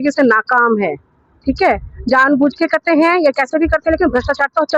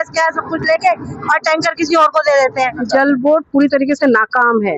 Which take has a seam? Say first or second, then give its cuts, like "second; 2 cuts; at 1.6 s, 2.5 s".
second; 1 cut; at 2.8 s